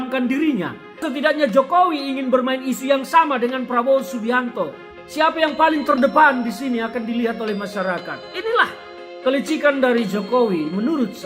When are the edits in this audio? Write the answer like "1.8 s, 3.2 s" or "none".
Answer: 1.0 s, 4.9 s